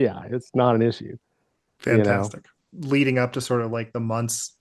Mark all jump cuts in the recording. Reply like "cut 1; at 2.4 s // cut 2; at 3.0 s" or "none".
none